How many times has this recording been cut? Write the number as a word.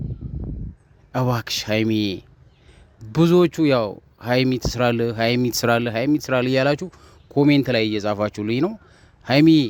zero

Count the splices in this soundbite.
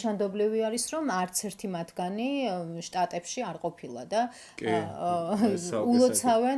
zero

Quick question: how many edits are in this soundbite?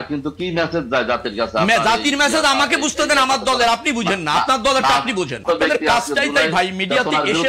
one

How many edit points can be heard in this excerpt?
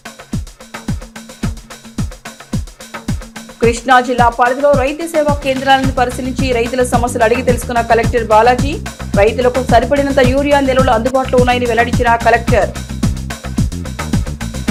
zero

